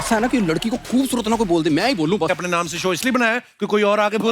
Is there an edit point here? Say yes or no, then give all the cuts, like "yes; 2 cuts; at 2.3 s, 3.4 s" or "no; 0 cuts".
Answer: yes; 1 cut; at 2.3 s